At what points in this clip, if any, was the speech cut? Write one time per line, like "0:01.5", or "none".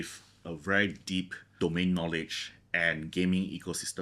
0:01.4